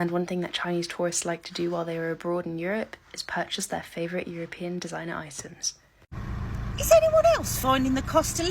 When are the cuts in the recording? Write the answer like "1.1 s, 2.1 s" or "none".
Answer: 6.1 s